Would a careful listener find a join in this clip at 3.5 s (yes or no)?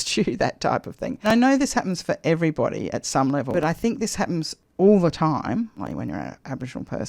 yes